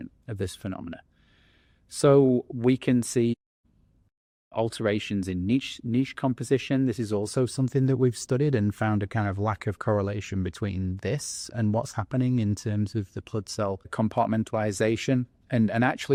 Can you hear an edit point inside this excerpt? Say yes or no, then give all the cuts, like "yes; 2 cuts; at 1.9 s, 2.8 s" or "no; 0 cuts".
no; 0 cuts